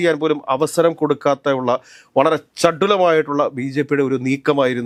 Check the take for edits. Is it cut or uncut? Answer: uncut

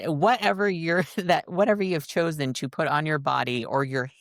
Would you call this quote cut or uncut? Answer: uncut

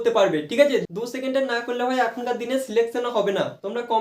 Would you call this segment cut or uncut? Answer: cut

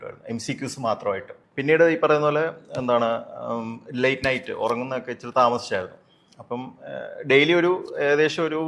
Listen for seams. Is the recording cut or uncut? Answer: cut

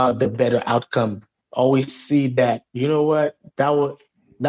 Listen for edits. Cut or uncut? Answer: cut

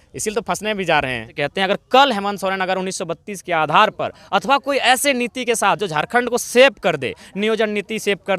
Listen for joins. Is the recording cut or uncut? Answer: cut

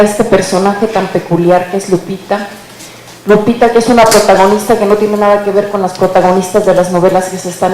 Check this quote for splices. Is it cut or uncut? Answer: cut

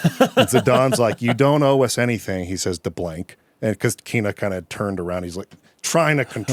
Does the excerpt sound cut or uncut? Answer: uncut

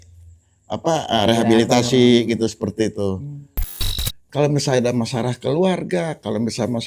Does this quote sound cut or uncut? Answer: cut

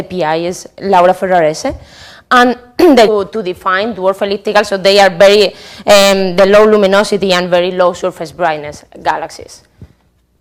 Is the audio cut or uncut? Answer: uncut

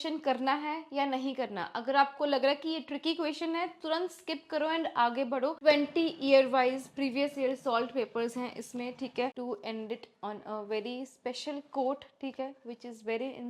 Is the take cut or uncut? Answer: cut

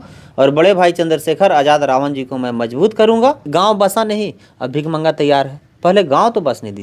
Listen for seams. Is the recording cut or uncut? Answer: cut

